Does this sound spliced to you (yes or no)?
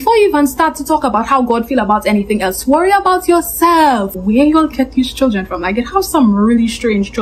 yes